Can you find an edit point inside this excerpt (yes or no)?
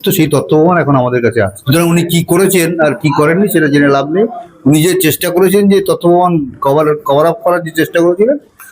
yes